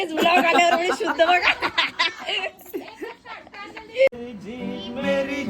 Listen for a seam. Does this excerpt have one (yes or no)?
yes